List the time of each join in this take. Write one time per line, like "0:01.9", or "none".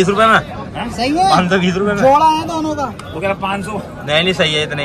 none